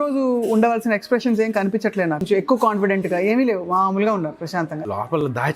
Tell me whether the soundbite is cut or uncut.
cut